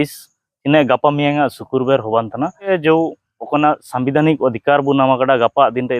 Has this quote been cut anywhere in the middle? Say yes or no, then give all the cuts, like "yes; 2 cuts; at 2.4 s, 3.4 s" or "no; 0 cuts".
yes; 1 cut; at 2.7 s